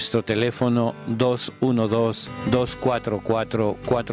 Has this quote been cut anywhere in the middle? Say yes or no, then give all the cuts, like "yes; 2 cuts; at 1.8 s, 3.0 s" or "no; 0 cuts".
yes; 1 cut; at 1.5 s